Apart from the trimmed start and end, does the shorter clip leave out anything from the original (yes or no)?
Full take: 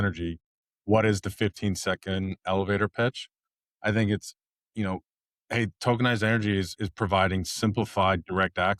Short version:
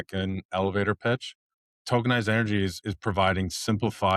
yes